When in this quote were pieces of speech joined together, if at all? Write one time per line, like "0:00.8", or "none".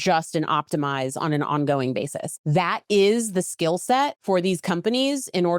0:02.3
0:04.2